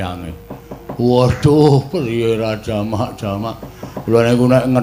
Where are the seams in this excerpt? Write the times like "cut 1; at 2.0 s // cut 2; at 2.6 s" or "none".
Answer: none

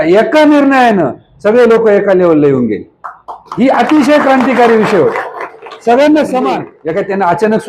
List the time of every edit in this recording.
cut 1; at 6.7 s

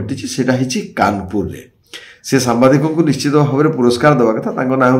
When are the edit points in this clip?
none

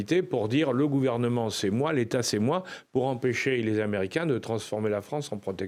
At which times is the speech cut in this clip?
none

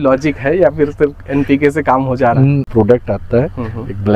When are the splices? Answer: cut 1; at 2.7 s

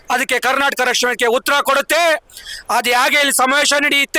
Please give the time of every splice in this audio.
none

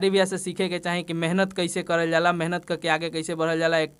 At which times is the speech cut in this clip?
none

